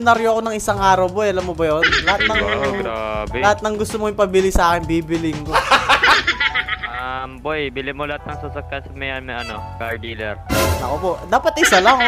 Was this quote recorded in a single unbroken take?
yes; 0 cuts

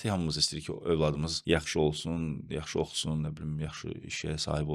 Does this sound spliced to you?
yes; 1 cut; at 1.3 s

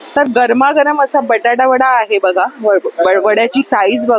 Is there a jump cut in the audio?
no; 0 cuts

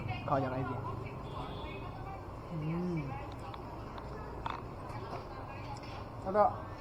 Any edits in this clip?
no; 0 cuts

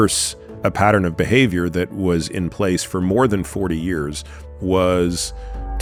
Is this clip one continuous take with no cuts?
yes; 0 cuts

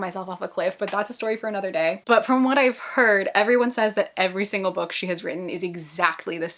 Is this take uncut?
yes; 0 cuts

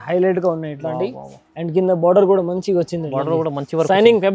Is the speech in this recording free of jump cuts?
yes; 0 cuts

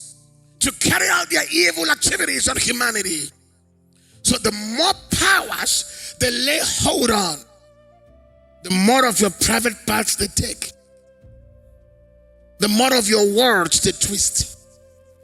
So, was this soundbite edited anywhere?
yes; 3 cuts; at 10.7 s, 12.6 s, 14.5 s

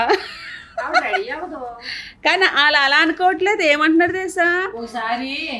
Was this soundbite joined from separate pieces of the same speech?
no; 0 cuts

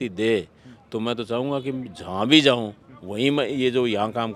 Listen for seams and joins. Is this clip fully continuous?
yes; 0 cuts

